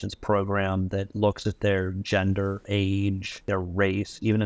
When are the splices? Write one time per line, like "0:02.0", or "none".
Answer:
0:02.7
0:03.4